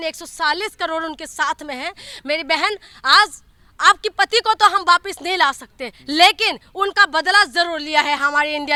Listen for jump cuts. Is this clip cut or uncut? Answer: uncut